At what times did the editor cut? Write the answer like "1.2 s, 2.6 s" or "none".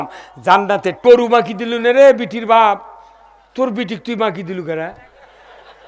1.0 s